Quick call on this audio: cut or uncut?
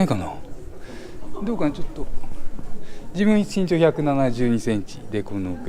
uncut